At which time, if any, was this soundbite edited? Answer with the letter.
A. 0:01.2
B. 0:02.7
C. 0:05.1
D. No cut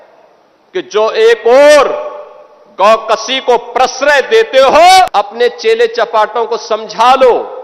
C